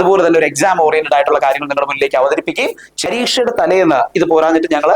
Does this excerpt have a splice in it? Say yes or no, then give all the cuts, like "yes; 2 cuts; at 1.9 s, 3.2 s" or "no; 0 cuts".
yes; 1 cut; at 3.1 s